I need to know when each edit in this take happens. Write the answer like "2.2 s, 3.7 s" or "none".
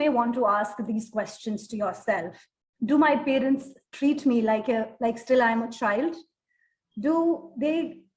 none